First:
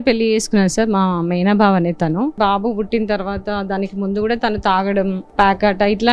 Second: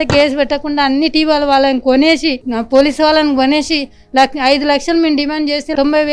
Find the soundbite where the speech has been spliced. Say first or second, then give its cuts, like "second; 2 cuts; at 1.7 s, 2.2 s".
first; 2 cuts; at 2.4 s, 5.2 s